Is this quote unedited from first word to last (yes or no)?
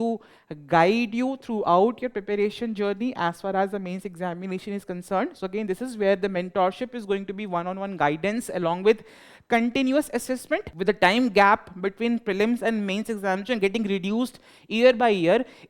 no